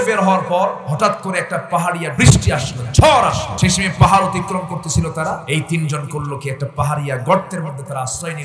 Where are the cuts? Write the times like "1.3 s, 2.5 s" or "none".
0.8 s, 2.1 s, 3.5 s, 5.4 s